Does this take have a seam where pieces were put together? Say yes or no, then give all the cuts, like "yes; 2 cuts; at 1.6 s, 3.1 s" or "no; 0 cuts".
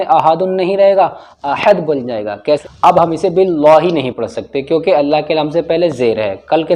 yes; 1 cut; at 2.5 s